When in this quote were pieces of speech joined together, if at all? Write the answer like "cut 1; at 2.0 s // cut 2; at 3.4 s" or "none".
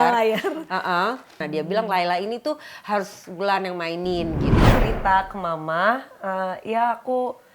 cut 1; at 1.4 s // cut 2; at 4.7 s